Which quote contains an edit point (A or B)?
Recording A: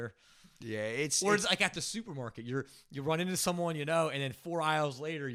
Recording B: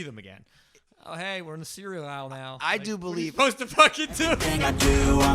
B